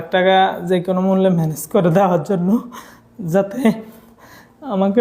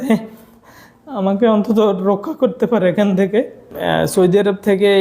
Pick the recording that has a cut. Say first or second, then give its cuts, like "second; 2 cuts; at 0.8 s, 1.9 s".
second; 1 cut; at 3.7 s